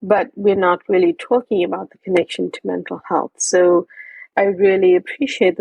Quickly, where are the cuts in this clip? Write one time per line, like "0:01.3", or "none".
0:04.3